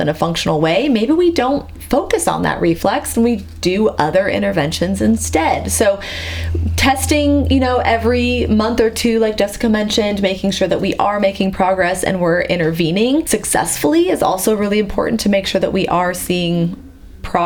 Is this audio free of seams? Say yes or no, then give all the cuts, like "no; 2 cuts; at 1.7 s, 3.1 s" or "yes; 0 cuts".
yes; 0 cuts